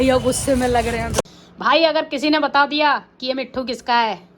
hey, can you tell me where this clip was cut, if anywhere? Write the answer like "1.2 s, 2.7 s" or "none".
1.2 s